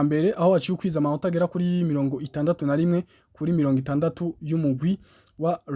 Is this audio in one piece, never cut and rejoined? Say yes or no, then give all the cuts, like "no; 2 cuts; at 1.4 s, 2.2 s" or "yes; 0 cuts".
yes; 0 cuts